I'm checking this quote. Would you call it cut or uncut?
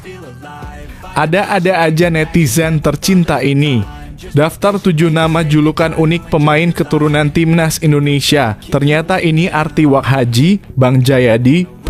cut